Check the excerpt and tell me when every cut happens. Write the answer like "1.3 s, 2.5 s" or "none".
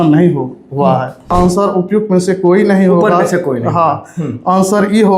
1.3 s